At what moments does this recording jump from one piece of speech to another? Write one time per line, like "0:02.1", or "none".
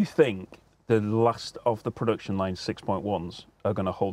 none